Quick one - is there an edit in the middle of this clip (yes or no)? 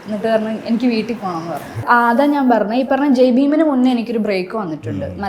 yes